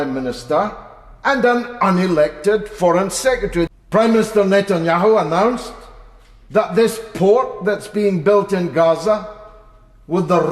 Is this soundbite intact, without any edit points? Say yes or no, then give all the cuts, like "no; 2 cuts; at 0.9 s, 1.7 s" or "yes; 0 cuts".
no; 1 cut; at 3.7 s